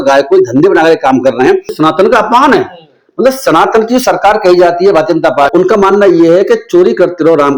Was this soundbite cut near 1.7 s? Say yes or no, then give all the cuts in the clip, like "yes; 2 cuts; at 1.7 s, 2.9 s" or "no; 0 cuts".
yes; 2 cuts; at 1.7 s, 5.5 s